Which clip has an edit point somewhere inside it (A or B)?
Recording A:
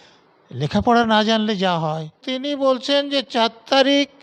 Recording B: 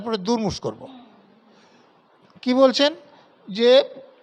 A